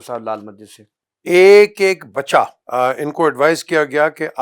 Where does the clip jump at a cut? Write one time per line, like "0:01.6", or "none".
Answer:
0:02.6